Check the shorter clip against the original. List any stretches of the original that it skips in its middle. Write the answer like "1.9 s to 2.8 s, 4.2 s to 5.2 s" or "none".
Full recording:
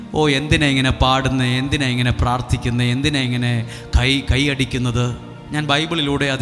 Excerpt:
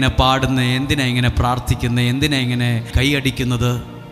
3.8 s to 4.3 s